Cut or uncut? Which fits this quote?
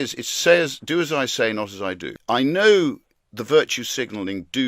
cut